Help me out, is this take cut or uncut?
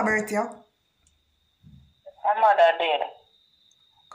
uncut